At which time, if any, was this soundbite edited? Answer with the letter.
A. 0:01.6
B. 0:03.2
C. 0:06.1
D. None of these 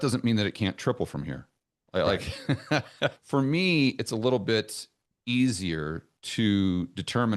B